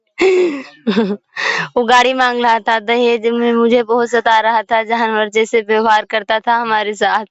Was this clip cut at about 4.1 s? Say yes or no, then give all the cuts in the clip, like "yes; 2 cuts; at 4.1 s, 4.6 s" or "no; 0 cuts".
no; 0 cuts